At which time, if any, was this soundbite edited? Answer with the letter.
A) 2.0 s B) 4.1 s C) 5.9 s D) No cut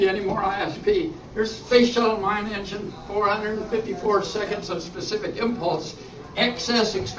B